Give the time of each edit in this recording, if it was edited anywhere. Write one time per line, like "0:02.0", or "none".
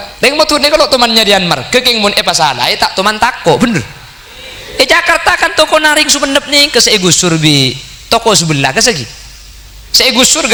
none